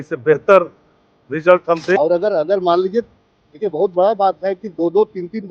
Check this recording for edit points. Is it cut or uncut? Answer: cut